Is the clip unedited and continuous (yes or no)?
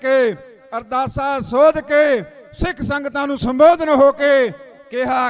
yes